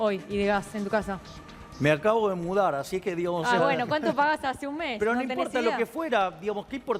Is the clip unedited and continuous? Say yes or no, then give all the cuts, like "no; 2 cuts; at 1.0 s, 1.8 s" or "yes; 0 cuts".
yes; 0 cuts